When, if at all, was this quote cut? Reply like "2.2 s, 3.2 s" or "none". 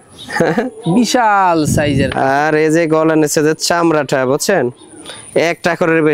none